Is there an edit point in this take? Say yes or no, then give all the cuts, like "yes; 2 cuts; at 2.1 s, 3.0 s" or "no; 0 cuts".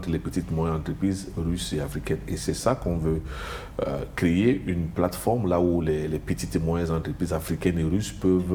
no; 0 cuts